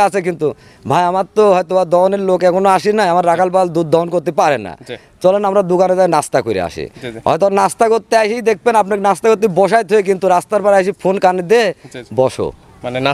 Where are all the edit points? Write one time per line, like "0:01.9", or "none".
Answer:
none